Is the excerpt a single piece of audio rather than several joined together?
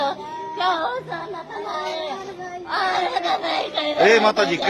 yes; 0 cuts

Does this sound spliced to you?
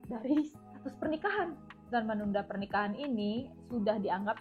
yes; 1 cut; at 1.7 s

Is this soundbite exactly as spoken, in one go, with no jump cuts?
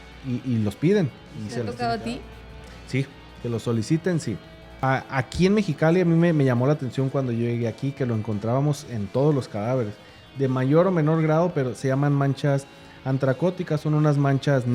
no; 2 cuts; at 1.7 s, 4.6 s

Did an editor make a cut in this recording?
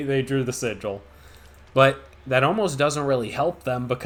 no; 0 cuts

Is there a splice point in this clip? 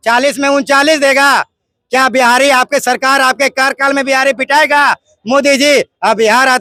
no; 0 cuts

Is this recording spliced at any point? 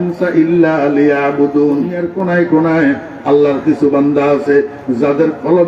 yes; 1 cut; at 2.0 s

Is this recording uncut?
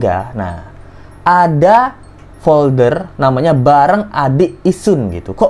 yes; 0 cuts

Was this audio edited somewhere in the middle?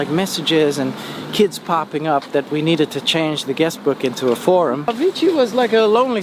yes; 1 cut; at 4.9 s

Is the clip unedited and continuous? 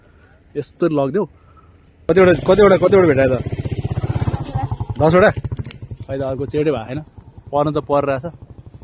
no; 1 cut; at 2.1 s

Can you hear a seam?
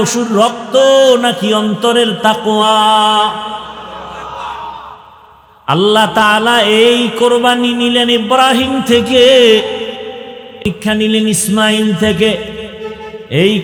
no; 0 cuts

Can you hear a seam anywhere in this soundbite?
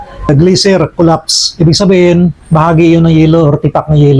no; 0 cuts

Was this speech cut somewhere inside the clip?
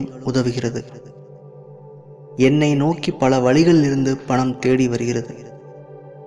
no; 0 cuts

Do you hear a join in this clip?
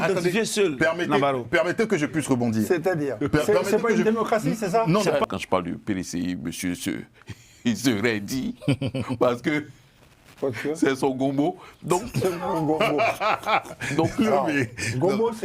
yes; 1 cut; at 5.2 s

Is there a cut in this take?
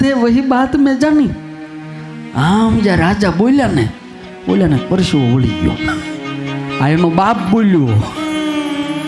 no; 0 cuts

